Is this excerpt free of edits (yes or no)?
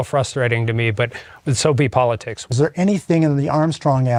yes